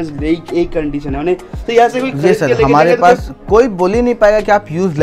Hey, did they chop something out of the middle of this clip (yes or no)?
no